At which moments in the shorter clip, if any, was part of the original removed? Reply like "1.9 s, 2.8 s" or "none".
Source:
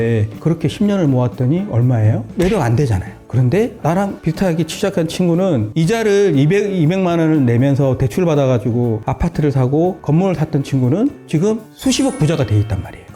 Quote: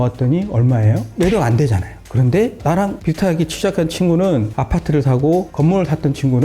4.5 s